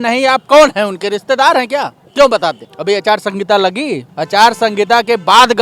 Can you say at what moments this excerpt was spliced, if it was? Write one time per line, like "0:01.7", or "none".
0:02.0
0:02.7
0:04.1